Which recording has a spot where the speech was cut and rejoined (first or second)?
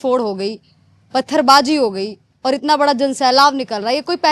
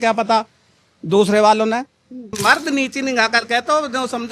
second